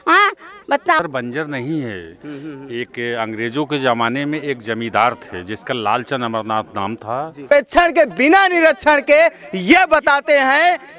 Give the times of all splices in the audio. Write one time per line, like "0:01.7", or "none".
0:01.0
0:07.5